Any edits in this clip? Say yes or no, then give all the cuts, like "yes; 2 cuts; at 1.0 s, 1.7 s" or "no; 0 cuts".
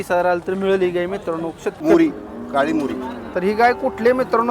yes; 1 cut; at 1.8 s